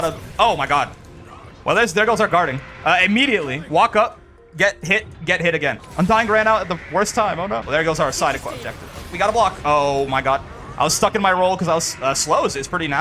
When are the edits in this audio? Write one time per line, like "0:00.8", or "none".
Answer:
0:05.8
0:07.6
0:09.0